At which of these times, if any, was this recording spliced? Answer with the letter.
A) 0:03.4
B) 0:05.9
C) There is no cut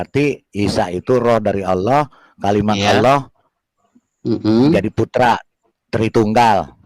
C